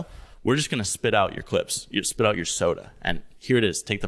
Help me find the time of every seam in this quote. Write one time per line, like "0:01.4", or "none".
none

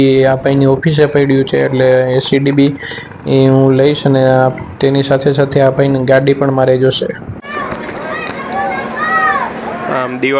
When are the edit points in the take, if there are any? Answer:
0:07.5

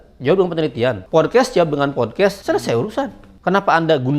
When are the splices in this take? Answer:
0:01.0
0:02.4
0:03.2

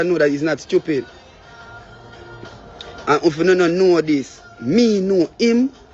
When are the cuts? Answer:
none

